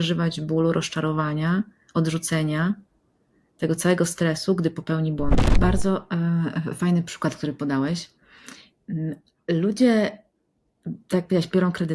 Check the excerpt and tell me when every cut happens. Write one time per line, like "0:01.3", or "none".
0:05.5